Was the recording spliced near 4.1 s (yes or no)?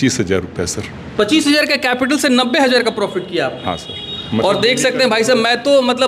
no